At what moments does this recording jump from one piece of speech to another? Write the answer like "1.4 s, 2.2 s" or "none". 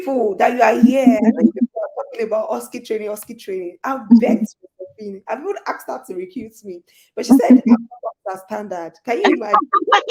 none

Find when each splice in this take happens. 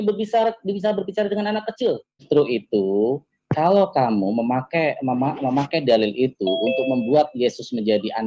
2.2 s

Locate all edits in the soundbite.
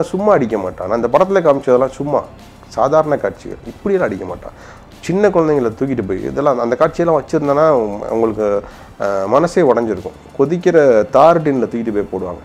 none

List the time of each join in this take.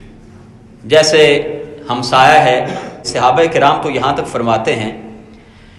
3.0 s

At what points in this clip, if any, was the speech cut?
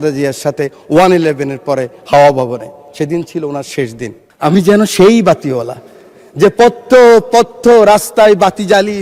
4.2 s

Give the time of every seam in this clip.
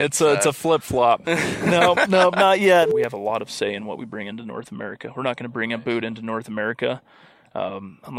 2.9 s

